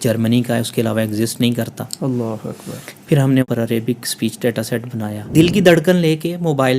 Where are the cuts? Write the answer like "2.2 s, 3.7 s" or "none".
3.4 s, 5.3 s